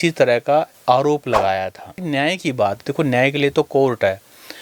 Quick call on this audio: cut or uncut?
cut